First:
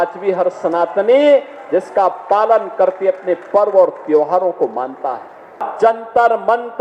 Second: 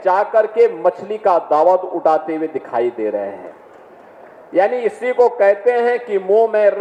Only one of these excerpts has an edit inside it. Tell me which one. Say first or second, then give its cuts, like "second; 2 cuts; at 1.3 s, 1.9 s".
first; 1 cut; at 5.7 s